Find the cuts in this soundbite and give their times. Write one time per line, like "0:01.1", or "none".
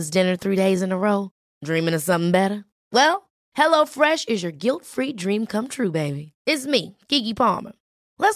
none